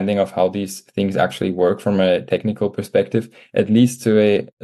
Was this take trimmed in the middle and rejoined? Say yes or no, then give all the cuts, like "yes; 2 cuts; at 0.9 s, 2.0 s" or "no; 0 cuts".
no; 0 cuts